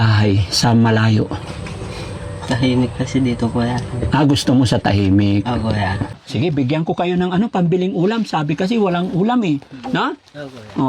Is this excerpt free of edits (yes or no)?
no